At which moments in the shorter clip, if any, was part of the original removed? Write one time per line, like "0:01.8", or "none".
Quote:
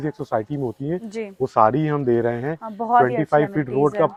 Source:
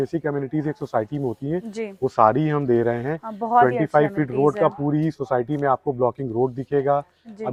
none